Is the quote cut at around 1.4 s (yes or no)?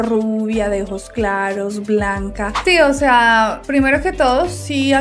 no